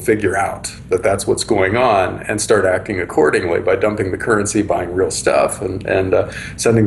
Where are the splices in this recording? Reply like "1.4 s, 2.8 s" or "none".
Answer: none